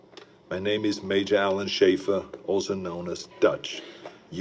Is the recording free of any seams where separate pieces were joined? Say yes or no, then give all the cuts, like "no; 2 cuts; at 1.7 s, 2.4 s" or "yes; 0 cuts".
yes; 0 cuts